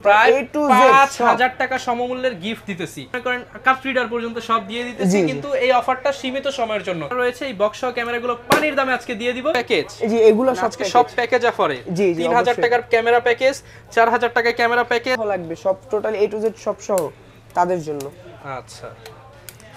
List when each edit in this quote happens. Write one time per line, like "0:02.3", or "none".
0:03.2
0:07.1
0:09.6
0:15.2